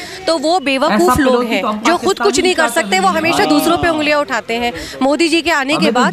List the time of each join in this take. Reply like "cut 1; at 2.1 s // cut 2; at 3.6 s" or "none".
none